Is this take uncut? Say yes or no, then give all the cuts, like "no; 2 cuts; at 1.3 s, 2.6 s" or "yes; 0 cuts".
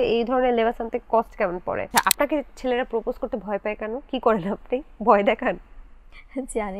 no; 1 cut; at 1.9 s